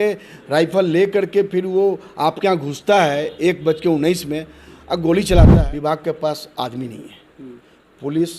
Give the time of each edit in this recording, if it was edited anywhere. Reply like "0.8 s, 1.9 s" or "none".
5.6 s